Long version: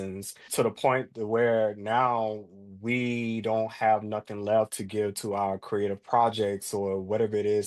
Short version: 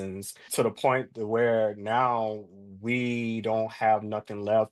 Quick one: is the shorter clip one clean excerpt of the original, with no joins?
yes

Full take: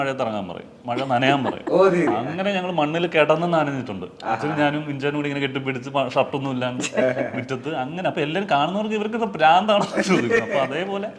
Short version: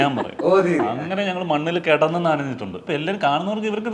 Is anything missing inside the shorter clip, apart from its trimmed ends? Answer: yes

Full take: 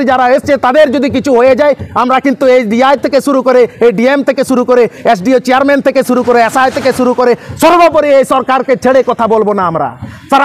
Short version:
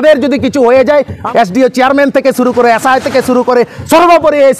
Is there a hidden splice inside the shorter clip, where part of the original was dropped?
yes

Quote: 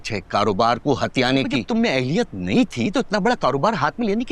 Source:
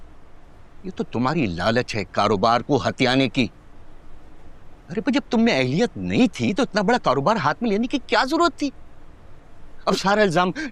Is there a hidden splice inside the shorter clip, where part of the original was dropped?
yes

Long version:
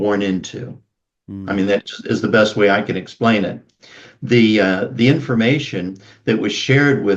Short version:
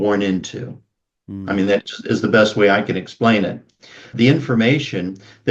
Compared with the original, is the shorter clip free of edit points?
no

